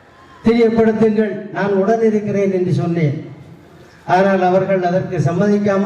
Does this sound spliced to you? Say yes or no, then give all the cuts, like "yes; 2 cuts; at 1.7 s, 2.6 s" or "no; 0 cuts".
no; 0 cuts